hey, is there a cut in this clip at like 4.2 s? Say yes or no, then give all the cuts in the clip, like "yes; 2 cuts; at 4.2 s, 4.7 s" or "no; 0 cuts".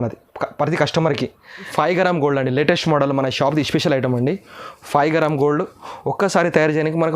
no; 1 cut; at 1.7 s